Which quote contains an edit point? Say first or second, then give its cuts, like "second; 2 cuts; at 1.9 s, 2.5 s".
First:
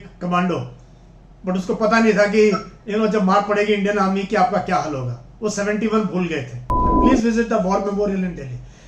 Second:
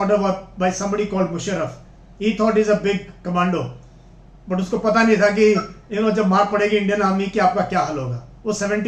first; 1 cut; at 6.9 s